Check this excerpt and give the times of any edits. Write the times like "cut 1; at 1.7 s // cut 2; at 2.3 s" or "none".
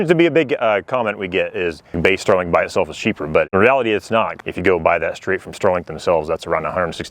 cut 1; at 1.9 s // cut 2; at 4.4 s